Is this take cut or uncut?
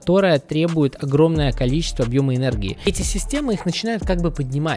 cut